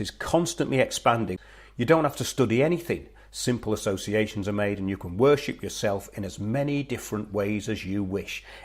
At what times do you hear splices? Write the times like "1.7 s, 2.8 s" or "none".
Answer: 1.3 s